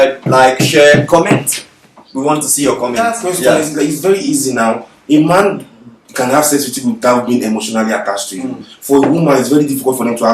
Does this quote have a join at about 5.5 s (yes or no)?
no